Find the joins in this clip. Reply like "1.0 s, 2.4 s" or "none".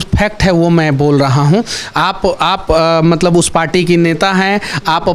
none